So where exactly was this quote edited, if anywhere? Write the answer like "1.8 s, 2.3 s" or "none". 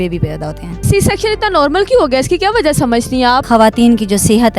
0.8 s, 3.4 s